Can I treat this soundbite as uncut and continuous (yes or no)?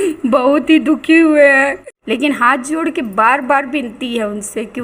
no